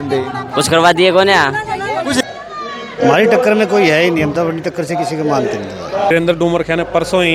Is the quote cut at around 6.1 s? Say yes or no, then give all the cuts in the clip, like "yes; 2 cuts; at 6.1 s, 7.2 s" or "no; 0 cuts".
yes; 2 cuts; at 2.2 s, 6.1 s